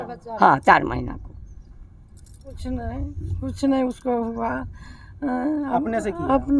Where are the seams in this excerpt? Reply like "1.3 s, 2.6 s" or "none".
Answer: 2.4 s